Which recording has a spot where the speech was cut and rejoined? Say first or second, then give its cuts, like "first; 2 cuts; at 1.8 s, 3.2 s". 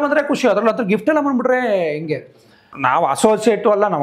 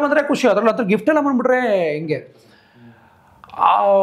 first; 1 cut; at 2.7 s